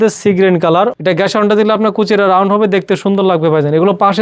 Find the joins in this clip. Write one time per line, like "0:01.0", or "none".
0:01.0